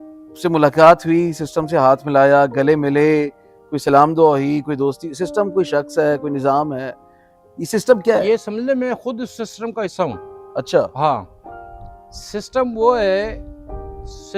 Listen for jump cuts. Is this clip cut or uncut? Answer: uncut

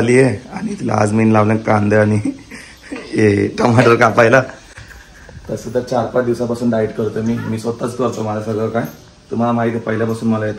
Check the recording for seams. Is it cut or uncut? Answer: uncut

